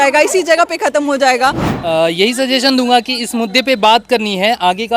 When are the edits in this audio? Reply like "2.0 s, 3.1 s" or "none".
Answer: 1.7 s

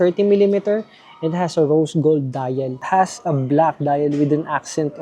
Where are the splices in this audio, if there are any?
2.8 s

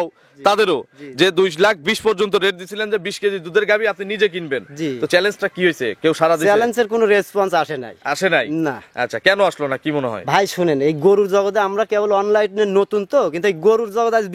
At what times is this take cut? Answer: none

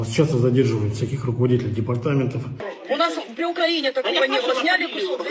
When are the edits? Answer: 2.7 s

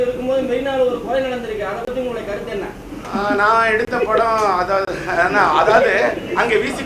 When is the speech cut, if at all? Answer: 2.9 s

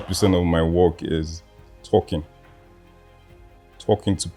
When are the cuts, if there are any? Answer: none

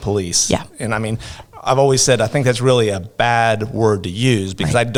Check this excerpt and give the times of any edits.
none

